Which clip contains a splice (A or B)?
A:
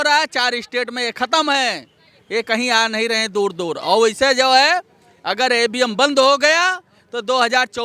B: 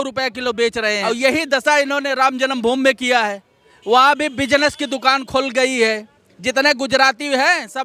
B